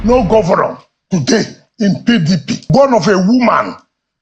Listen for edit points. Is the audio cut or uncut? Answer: cut